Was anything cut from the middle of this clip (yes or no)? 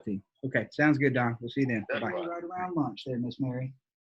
yes